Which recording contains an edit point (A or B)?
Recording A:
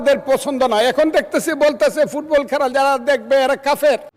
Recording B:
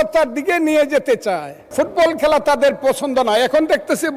B